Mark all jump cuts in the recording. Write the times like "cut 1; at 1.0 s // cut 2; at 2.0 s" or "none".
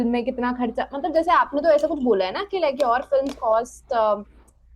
none